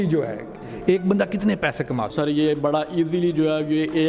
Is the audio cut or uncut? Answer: cut